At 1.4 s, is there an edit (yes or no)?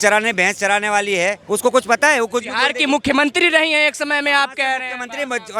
yes